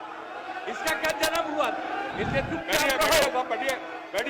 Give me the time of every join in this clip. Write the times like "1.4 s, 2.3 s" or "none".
2.1 s